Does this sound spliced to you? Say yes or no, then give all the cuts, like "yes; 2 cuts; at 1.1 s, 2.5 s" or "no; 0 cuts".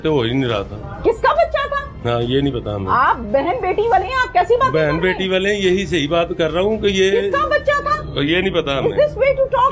no; 0 cuts